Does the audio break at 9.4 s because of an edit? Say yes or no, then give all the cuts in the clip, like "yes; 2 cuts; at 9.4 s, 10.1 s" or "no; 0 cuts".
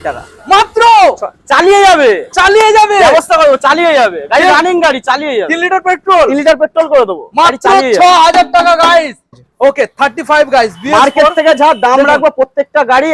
yes; 1 cut; at 9.4 s